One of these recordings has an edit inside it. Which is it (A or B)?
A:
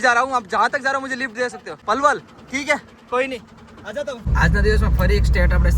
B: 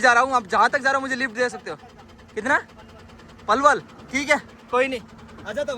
A